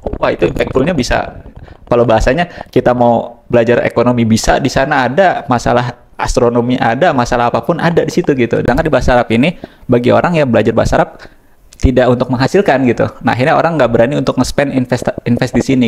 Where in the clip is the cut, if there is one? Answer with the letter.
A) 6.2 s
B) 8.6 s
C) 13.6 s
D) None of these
B